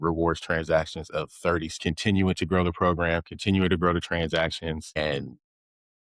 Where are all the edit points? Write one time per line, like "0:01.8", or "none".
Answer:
0:01.7
0:04.9